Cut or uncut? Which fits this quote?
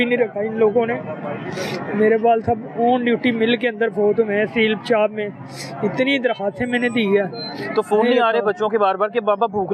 uncut